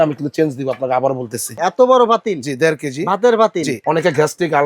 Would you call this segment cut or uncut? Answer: cut